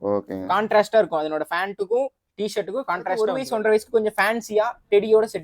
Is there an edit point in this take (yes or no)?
yes